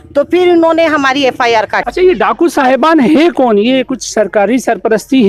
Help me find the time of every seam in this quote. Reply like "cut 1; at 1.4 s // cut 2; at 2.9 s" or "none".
none